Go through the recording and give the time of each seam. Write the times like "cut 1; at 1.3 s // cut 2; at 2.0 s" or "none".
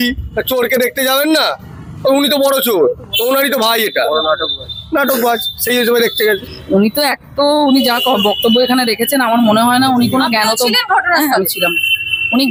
none

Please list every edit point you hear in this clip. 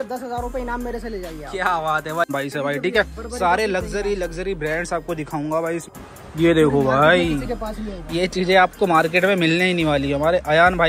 cut 1; at 2.3 s // cut 2; at 5.9 s

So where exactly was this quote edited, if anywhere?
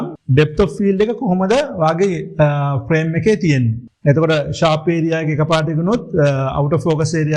none

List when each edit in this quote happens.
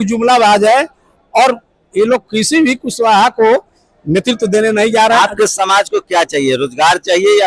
none

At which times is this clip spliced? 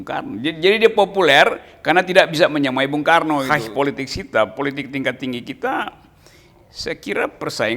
cut 1; at 3.5 s

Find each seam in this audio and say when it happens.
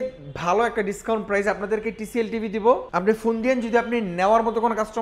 cut 1; at 2.9 s

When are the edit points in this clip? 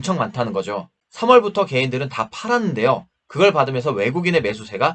cut 1; at 1.0 s

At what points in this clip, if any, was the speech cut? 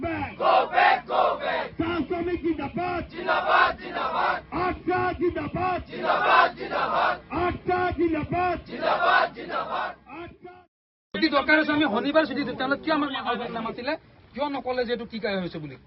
cut 1; at 1.4 s

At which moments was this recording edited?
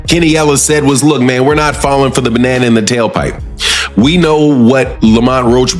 cut 1; at 2.1 s

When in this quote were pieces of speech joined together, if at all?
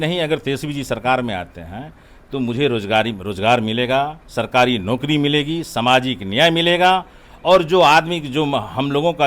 none

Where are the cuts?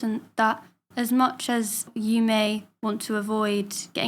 cut 1; at 1.9 s

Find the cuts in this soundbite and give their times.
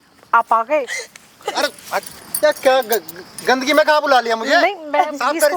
none

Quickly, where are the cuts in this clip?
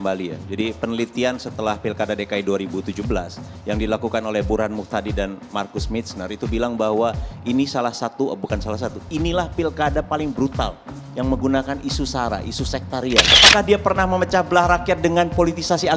cut 1; at 13.4 s

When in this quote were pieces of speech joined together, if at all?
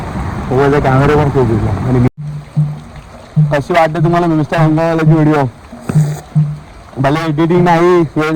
cut 1; at 2.1 s

